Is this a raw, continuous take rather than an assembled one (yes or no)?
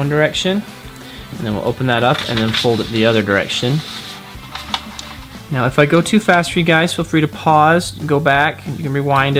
yes